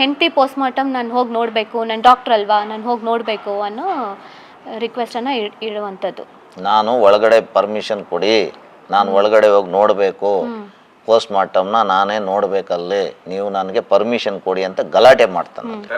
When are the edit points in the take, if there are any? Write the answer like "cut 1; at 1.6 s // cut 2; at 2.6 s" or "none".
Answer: none